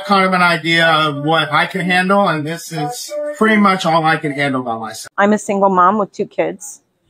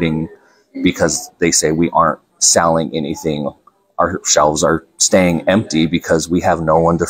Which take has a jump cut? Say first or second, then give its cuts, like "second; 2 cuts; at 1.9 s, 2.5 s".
first; 1 cut; at 5.0 s